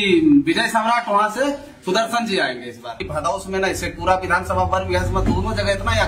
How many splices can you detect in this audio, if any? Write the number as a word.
one